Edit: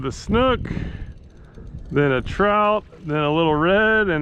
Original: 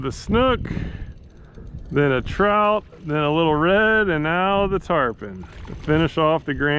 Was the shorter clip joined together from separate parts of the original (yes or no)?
no